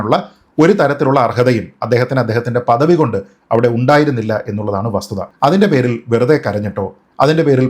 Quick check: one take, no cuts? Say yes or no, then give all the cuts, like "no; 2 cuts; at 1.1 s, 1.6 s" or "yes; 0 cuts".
no; 1 cut; at 5.2 s